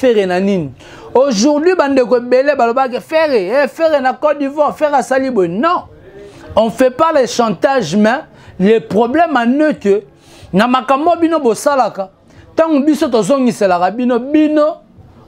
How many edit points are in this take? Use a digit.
0